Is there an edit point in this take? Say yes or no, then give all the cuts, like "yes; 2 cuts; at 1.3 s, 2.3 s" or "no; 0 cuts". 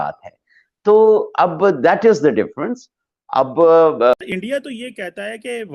yes; 1 cut; at 4.1 s